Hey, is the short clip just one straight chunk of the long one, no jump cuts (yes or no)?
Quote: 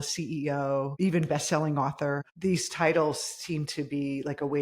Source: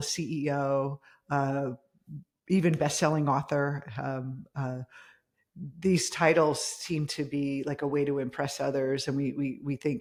no